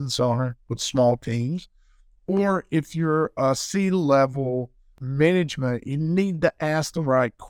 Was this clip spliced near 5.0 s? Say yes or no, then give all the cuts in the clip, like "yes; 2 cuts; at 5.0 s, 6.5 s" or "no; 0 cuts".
yes; 1 cut; at 5.0 s